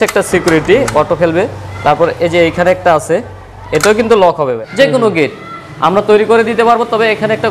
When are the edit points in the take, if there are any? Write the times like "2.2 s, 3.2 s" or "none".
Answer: 4.6 s